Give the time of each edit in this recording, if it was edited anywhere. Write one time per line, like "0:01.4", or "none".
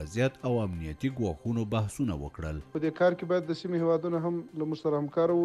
0:02.7